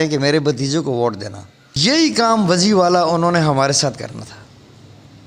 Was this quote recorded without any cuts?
no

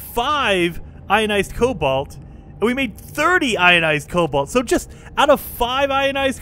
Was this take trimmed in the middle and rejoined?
no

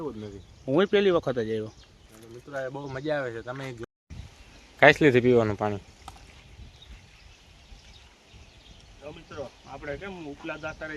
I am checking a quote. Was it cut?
yes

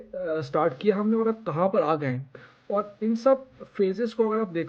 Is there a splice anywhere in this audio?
no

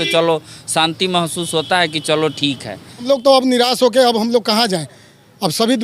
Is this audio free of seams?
no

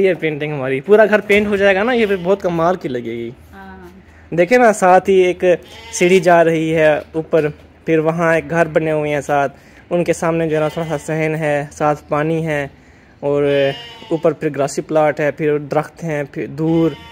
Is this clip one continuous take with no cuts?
yes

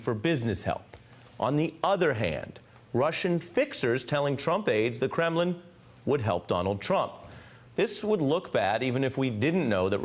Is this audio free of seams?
yes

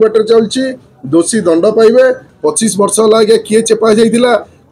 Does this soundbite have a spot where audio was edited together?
yes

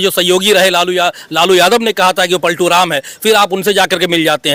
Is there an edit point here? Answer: no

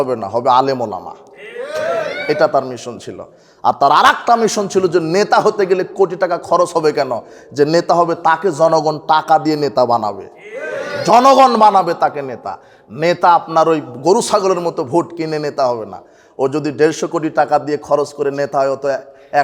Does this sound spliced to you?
no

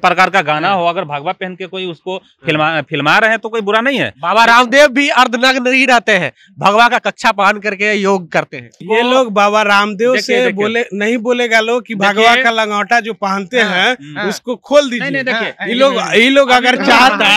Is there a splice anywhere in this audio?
yes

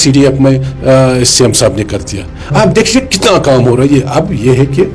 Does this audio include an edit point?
no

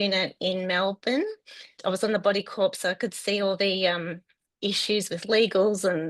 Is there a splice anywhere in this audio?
yes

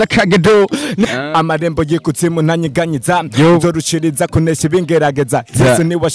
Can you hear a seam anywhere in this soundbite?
yes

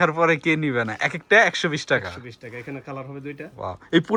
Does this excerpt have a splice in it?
no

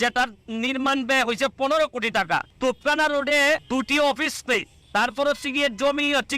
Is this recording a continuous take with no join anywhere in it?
no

